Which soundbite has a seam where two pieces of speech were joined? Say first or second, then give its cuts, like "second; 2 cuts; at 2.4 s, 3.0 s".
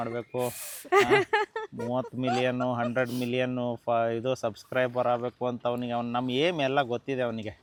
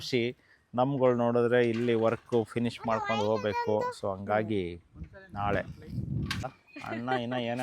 second; 1 cut; at 6.4 s